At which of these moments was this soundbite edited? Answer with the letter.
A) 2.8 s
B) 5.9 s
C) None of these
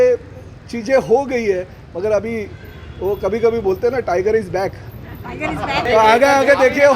B